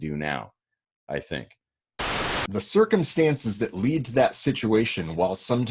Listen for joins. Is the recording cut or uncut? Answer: cut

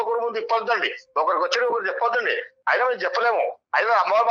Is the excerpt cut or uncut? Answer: uncut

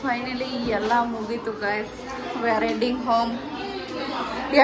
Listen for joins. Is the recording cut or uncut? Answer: uncut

